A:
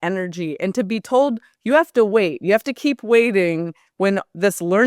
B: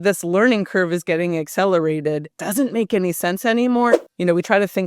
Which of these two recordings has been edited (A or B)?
B